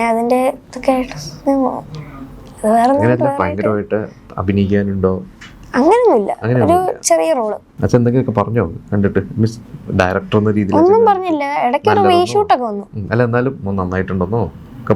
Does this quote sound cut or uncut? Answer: cut